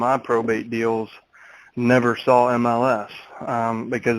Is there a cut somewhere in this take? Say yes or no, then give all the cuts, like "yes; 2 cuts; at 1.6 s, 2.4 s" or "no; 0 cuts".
no; 0 cuts